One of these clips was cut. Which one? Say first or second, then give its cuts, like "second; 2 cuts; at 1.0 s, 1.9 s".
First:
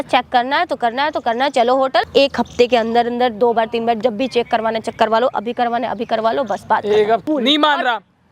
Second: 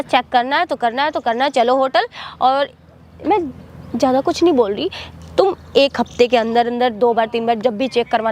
first; 2 cuts; at 2.1 s, 7.2 s